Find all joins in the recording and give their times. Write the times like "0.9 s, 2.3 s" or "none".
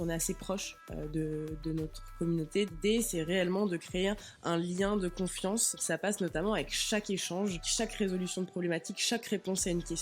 2.7 s, 5.7 s, 7.7 s